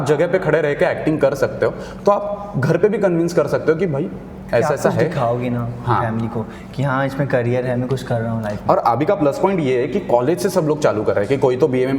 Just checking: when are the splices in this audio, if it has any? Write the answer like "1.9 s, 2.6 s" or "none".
none